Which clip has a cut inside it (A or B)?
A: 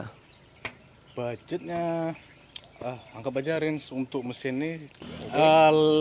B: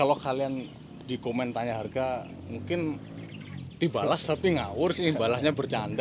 A